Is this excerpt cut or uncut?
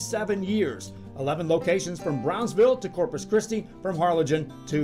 uncut